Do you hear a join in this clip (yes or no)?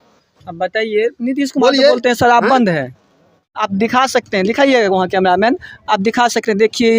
yes